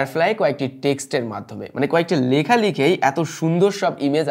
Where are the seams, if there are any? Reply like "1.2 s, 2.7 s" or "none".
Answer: none